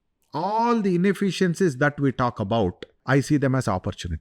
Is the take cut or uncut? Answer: cut